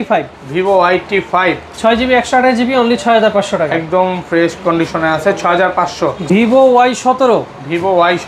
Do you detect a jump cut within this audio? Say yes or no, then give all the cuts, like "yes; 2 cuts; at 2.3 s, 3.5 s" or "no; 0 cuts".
yes; 1 cut; at 6.2 s